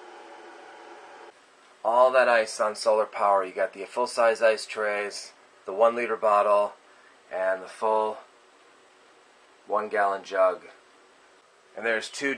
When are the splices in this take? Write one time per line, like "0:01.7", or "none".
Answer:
none